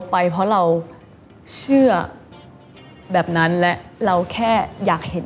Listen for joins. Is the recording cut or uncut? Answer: uncut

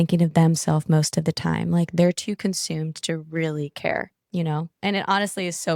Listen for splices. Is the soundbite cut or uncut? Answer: uncut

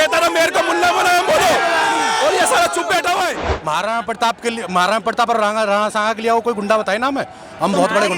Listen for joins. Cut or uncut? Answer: cut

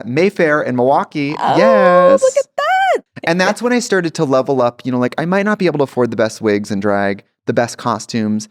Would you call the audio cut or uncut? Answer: cut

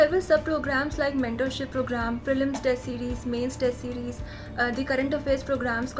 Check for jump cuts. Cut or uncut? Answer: uncut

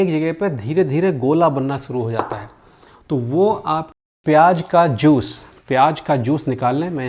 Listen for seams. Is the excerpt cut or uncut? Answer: cut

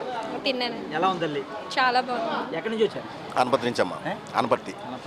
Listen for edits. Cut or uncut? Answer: cut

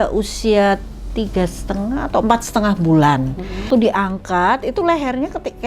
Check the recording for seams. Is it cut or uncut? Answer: cut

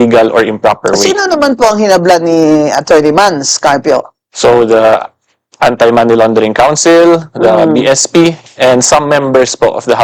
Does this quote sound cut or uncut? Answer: uncut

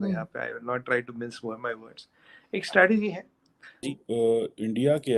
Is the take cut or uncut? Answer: cut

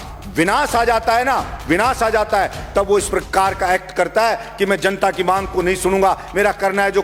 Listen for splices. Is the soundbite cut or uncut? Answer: uncut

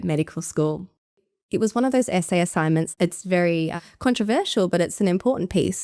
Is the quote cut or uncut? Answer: cut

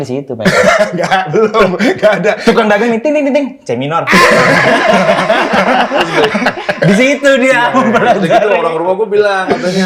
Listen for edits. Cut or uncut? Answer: uncut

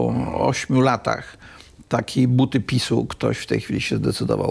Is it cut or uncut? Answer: uncut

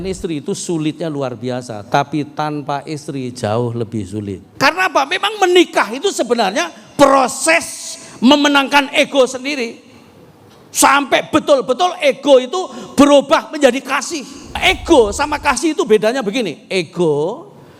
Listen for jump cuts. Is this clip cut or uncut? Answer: cut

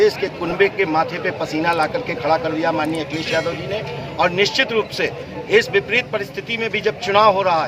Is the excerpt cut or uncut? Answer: uncut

